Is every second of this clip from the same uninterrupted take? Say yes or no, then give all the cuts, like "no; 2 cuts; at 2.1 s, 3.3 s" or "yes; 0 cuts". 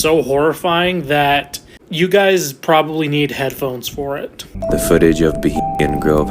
no; 1 cut; at 4.6 s